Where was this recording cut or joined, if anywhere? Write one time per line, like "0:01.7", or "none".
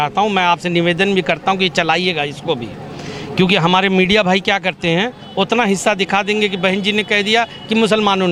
none